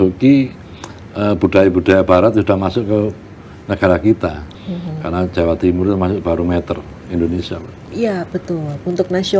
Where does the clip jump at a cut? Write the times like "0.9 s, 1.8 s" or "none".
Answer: 4.5 s